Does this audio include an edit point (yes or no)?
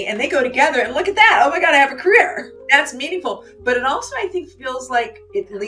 yes